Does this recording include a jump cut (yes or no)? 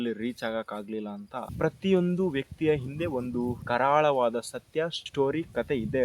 yes